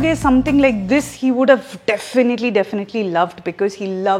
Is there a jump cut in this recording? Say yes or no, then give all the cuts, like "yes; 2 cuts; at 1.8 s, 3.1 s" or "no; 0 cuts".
no; 0 cuts